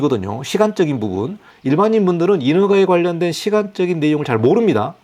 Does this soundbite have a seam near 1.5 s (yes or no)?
no